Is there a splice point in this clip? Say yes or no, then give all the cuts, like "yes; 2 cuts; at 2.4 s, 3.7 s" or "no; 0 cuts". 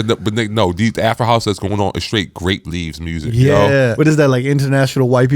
yes; 1 cut; at 3.9 s